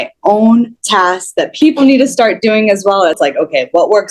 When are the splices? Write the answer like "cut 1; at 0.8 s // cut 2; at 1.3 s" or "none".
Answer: cut 1; at 1.1 s // cut 2; at 3.2 s

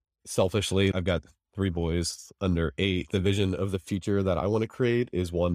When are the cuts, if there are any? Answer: cut 1; at 0.9 s // cut 2; at 3.1 s

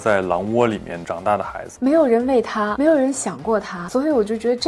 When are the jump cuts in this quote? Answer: cut 1; at 1.6 s // cut 2; at 2.7 s

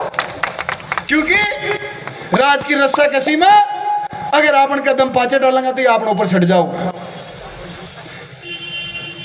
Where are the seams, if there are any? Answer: none

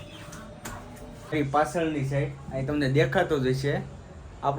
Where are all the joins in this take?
cut 1; at 1.3 s

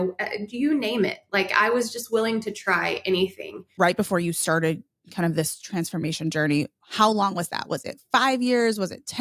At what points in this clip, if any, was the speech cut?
cut 1; at 3.7 s

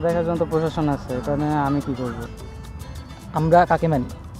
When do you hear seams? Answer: none

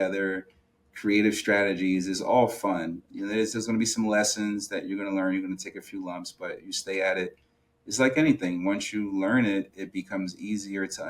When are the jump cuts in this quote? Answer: cut 1; at 3.1 s

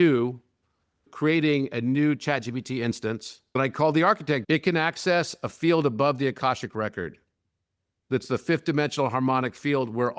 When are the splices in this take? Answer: cut 1; at 1.1 s // cut 2; at 3.3 s // cut 3; at 4.4 s

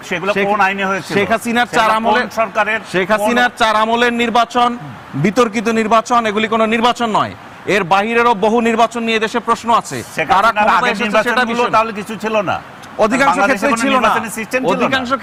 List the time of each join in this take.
none

